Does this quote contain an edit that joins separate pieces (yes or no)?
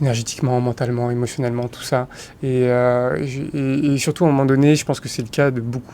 no